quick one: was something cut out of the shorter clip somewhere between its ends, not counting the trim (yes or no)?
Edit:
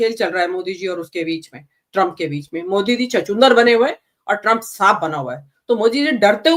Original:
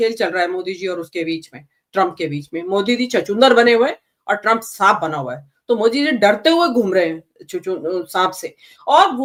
no